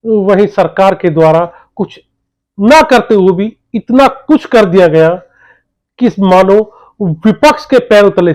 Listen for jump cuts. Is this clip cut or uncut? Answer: uncut